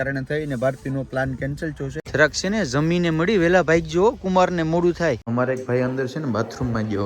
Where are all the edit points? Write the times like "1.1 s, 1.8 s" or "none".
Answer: 1.9 s, 5.2 s